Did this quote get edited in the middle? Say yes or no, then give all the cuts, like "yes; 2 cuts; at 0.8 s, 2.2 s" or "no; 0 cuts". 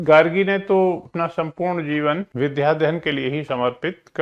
yes; 2 cuts; at 1.1 s, 2.3 s